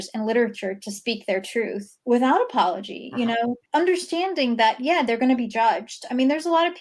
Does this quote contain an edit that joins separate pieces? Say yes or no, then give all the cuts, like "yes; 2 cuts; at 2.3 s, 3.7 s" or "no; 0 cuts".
no; 0 cuts